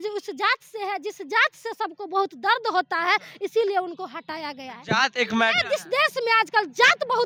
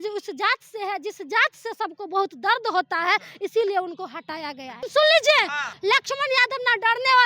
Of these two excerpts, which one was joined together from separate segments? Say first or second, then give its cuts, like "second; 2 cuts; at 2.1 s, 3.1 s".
second; 2 cuts; at 4.8 s, 5.7 s